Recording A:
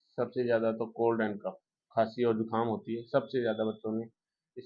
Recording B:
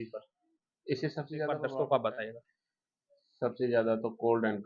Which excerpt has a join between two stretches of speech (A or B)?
B